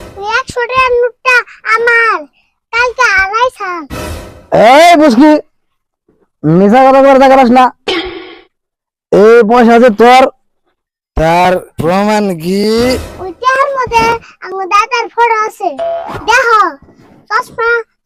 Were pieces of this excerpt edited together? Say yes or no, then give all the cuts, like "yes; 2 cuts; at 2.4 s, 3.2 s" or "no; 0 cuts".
no; 0 cuts